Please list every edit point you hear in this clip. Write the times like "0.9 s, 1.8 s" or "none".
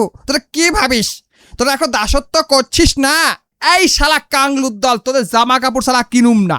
3.5 s